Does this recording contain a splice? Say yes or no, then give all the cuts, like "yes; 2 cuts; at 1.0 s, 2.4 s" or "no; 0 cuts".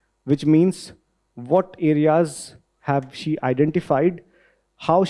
no; 0 cuts